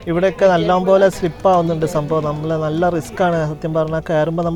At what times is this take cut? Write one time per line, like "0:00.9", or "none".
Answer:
none